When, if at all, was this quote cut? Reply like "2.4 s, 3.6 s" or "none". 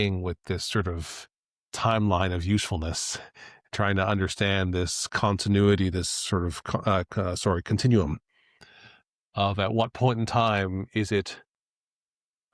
none